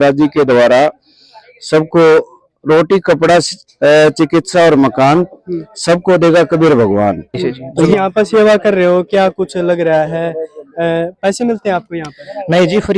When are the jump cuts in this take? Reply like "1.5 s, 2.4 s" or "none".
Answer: 7.9 s